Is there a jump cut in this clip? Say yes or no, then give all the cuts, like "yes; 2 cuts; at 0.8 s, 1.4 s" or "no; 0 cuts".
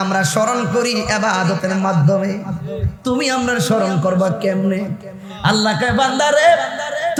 no; 0 cuts